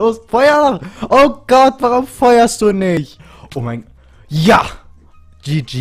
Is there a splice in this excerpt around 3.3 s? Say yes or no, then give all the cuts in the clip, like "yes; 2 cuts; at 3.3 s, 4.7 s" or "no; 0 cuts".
yes; 1 cut; at 3.3 s